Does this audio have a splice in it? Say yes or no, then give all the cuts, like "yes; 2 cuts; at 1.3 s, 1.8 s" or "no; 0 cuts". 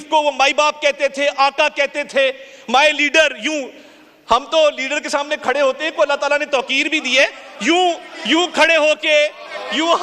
no; 0 cuts